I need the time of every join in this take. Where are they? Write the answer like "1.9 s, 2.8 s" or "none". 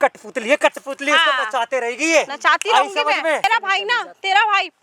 3.4 s